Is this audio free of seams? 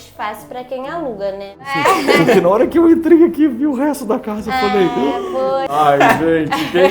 no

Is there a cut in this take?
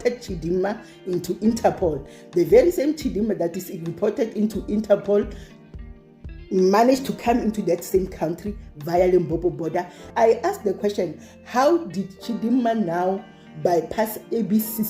yes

